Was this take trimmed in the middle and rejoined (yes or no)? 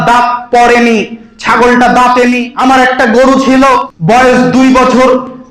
yes